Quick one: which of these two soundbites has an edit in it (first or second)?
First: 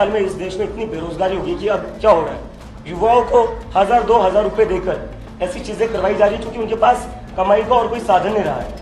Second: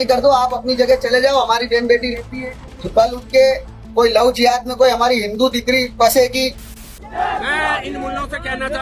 second